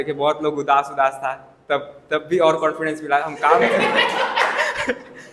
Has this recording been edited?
no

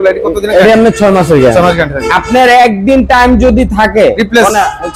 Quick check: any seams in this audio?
no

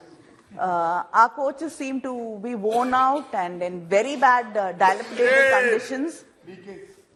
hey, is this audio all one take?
yes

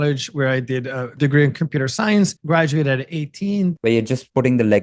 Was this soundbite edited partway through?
yes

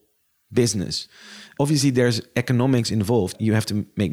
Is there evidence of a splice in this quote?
yes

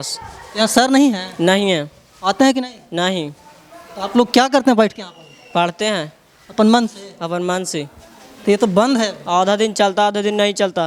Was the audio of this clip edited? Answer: no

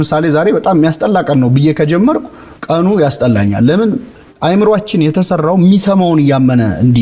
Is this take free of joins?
yes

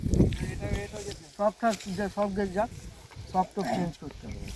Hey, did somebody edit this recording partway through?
no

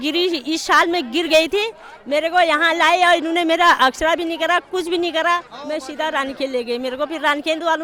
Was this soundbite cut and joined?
no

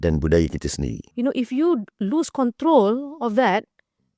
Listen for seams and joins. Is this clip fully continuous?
no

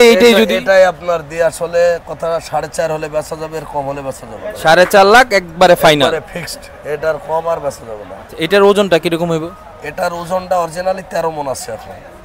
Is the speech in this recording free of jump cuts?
yes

